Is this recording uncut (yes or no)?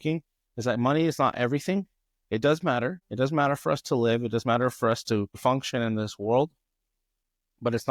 yes